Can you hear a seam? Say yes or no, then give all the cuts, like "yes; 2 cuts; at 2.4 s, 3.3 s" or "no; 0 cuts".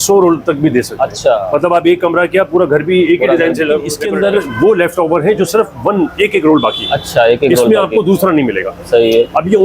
yes; 1 cut; at 3.9 s